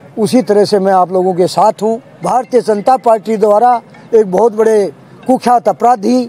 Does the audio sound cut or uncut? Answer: cut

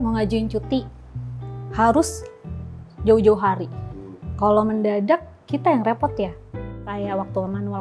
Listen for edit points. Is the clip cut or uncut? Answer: cut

